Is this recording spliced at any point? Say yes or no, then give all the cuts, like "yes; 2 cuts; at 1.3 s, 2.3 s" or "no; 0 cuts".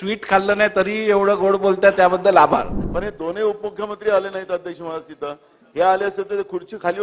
yes; 1 cut; at 2.8 s